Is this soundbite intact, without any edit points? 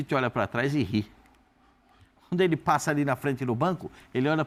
yes; 0 cuts

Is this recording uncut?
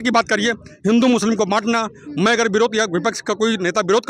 yes; 0 cuts

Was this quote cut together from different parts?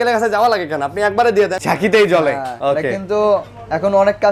yes; 2 cuts; at 1.6 s, 2.5 s

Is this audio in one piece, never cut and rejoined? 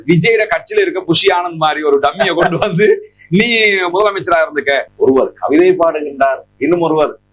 no; 1 cut; at 4.9 s

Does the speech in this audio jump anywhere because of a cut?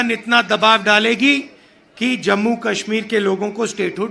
no; 0 cuts

